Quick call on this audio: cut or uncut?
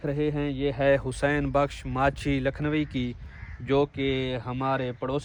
uncut